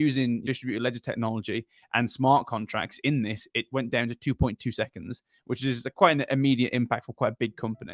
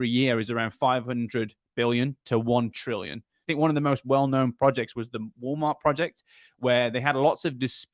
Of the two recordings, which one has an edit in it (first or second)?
second